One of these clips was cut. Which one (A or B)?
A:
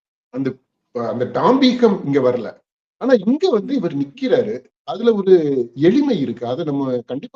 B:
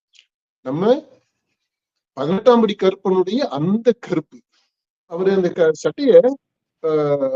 B